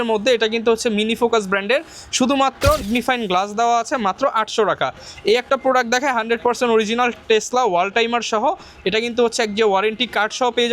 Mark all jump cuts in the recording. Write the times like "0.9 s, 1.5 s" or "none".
2.8 s